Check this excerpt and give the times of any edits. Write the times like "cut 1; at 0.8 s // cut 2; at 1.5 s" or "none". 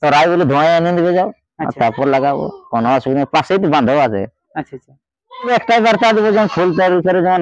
cut 1; at 5.5 s